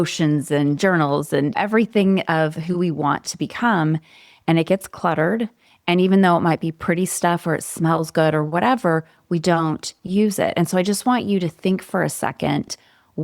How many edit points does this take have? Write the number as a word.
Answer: one